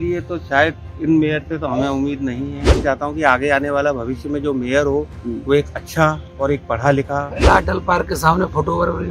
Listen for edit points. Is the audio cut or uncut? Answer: cut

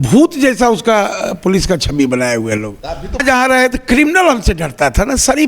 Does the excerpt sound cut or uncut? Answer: cut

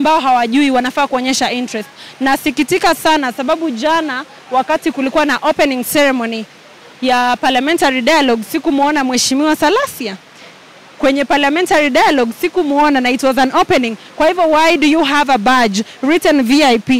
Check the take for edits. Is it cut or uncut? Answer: uncut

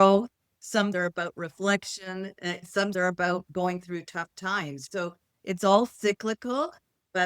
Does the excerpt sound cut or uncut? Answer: cut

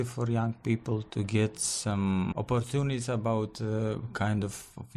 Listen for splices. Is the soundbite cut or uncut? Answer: cut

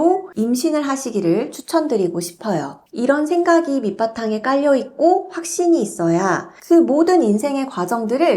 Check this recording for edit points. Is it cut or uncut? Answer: cut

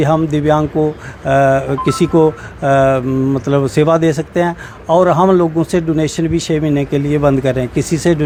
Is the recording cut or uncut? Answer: uncut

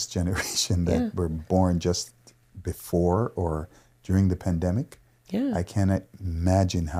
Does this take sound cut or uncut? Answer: uncut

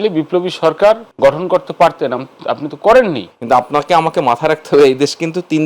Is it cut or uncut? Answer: cut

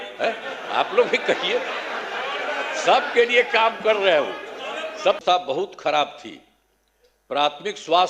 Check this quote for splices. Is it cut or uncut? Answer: cut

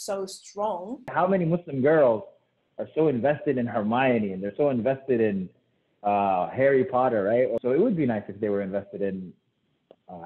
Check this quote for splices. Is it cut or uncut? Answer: cut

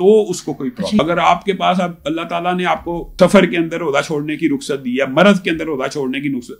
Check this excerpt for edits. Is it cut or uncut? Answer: cut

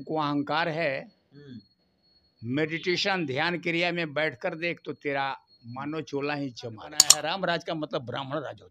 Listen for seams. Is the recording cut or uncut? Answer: cut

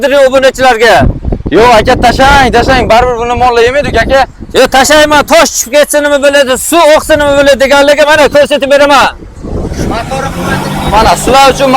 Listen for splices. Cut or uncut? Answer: uncut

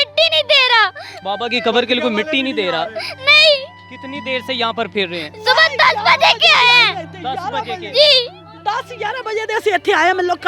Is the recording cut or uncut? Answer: cut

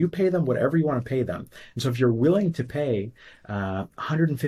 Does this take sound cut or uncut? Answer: uncut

